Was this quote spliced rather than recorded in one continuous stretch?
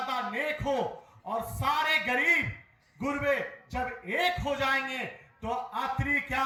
no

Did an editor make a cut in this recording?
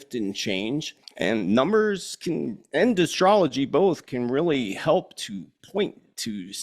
yes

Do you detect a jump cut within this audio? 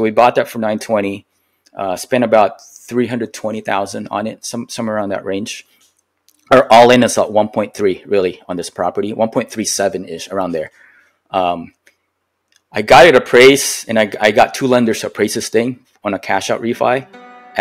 no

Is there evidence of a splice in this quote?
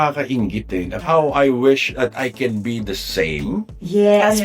yes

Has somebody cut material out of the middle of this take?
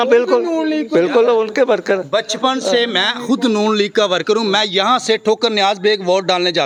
no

